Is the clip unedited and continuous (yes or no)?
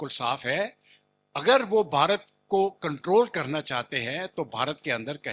yes